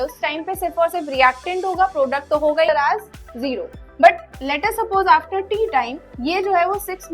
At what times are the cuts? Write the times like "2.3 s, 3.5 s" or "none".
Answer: 2.7 s